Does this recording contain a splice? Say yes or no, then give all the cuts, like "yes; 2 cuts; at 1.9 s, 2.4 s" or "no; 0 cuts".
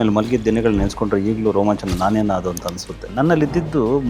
yes; 1 cut; at 3.1 s